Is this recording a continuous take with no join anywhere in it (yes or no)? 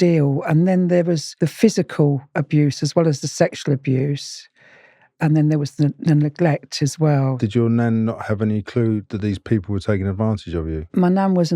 no